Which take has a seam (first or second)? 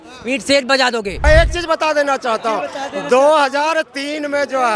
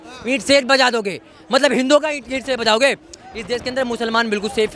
first